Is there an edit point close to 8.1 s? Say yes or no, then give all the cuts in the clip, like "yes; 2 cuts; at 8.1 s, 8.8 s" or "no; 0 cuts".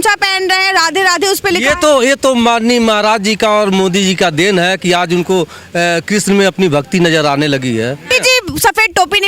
yes; 1 cut; at 8.1 s